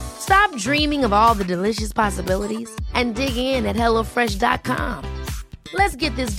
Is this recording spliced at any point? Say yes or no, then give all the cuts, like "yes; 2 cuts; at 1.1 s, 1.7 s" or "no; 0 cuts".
no; 0 cuts